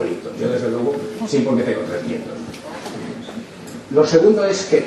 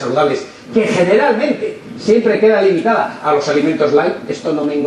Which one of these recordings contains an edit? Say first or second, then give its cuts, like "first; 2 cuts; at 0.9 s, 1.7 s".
first; 1 cut; at 3.4 s